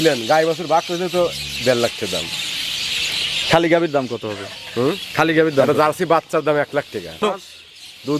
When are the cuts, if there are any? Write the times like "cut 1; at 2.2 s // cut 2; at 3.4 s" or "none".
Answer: cut 1; at 7.2 s